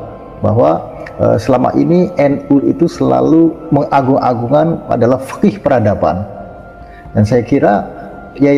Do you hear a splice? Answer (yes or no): yes